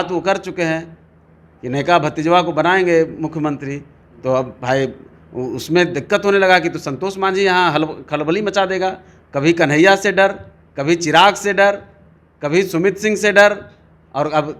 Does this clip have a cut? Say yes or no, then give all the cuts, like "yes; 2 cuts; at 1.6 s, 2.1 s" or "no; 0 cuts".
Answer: no; 0 cuts